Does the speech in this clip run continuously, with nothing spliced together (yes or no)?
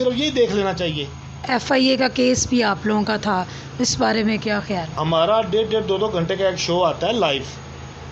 no